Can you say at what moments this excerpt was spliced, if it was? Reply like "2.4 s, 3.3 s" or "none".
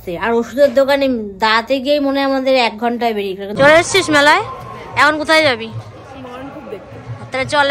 3.6 s